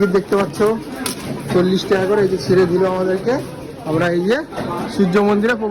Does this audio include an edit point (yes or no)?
no